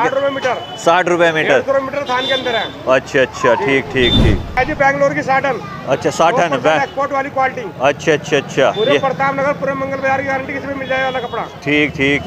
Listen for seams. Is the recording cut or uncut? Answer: cut